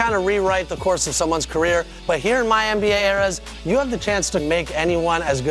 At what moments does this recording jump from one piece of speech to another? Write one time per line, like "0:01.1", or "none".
0:01.9
0:04.4